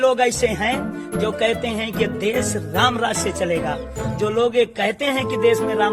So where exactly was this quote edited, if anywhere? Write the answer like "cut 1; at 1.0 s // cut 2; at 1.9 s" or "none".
none